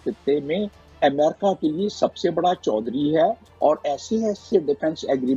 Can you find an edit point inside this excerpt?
no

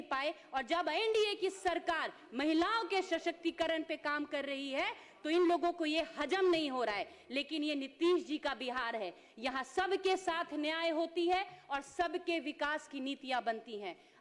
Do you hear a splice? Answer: no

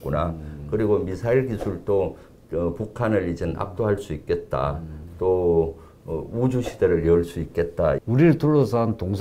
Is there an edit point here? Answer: yes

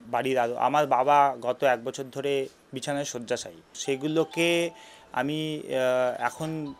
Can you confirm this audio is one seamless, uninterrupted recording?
no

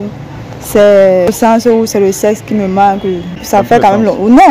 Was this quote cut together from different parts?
yes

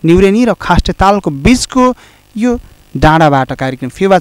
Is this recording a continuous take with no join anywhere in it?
yes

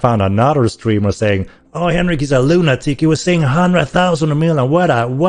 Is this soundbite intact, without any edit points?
yes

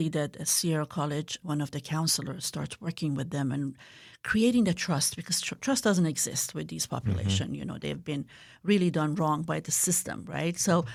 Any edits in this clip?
no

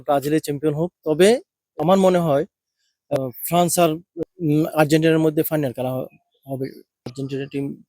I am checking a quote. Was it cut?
yes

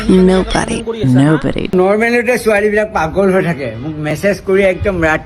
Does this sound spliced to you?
yes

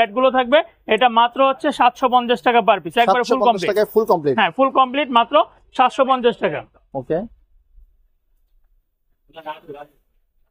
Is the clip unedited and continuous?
yes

